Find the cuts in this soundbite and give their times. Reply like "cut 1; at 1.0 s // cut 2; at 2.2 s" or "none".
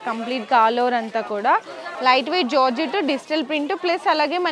cut 1; at 1.7 s